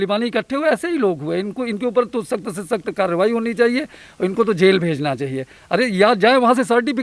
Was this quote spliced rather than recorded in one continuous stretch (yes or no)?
no